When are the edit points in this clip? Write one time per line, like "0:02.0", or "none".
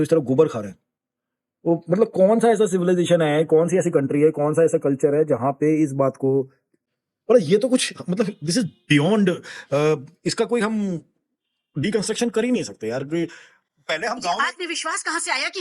none